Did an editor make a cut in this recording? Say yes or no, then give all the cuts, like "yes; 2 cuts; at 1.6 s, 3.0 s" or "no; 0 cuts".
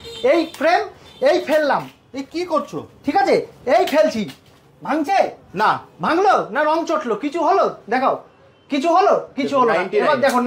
no; 0 cuts